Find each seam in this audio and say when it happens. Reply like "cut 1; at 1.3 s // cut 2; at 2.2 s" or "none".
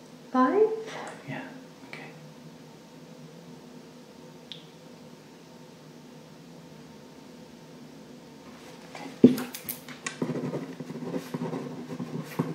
cut 1; at 6.7 s